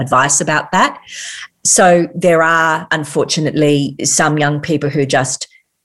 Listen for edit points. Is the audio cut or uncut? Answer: cut